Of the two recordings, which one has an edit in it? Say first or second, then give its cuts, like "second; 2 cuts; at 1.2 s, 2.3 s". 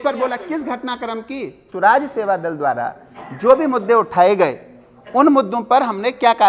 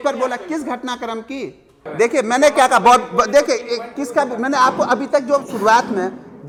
first; 1 cut; at 1.6 s